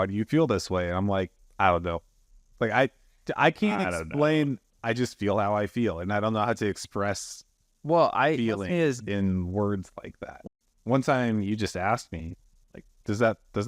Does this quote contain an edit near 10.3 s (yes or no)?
yes